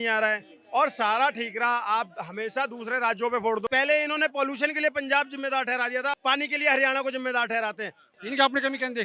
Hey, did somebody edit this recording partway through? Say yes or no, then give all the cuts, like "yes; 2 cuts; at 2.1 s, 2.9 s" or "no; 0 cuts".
yes; 2 cuts; at 3.7 s, 8.1 s